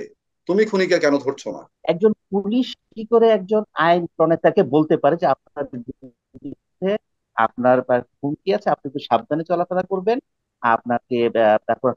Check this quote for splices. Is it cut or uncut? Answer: cut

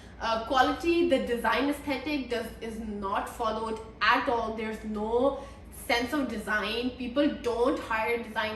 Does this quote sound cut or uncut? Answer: uncut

